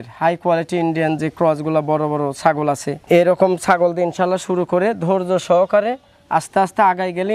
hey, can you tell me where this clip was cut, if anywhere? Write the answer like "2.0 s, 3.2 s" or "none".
none